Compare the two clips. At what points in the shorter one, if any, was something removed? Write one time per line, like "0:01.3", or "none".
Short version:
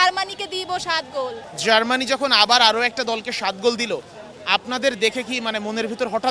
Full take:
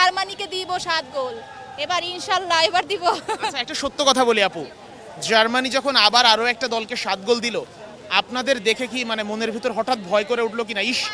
0:01.4